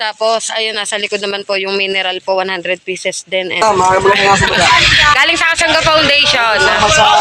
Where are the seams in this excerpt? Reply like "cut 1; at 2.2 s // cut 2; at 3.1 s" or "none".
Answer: cut 1; at 3.6 s